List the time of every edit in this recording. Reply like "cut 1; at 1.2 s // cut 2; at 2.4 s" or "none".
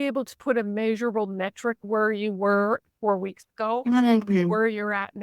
cut 1; at 1.8 s